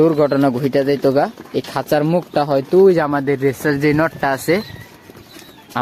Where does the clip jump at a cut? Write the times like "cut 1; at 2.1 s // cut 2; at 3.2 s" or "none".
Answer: none